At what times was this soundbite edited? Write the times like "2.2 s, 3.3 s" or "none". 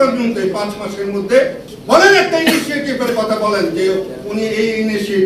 1.7 s